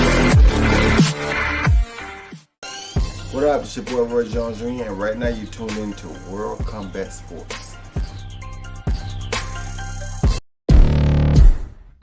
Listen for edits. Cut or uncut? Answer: cut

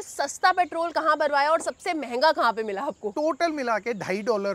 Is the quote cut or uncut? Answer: cut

